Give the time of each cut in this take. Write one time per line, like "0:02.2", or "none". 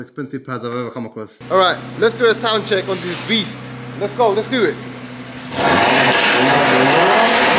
0:01.4

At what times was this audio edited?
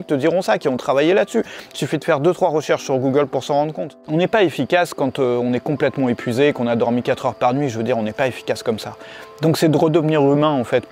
0:03.9

